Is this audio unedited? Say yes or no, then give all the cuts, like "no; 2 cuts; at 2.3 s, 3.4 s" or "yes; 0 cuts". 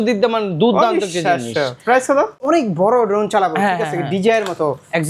no; 1 cut; at 2.4 s